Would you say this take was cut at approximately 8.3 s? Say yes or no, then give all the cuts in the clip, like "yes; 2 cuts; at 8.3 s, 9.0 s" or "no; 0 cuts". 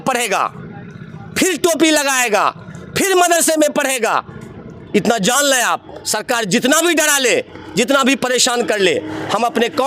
no; 0 cuts